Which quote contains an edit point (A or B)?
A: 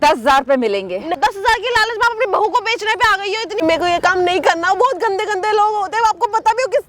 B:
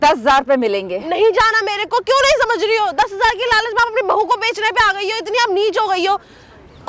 A